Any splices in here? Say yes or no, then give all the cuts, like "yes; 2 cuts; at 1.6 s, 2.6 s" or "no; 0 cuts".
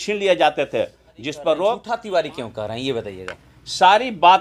yes; 1 cut; at 1.9 s